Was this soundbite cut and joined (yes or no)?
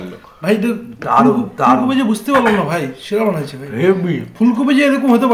no